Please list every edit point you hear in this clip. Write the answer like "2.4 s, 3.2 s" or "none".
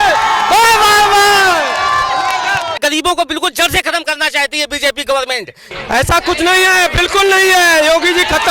2.8 s, 5.6 s